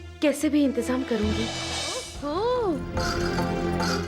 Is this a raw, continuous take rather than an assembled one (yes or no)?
no